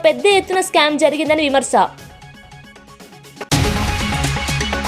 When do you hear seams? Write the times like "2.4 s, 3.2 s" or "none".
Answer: 2.4 s